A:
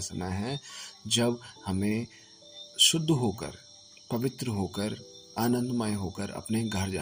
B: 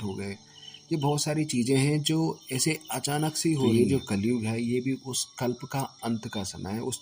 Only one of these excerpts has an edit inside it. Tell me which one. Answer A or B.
B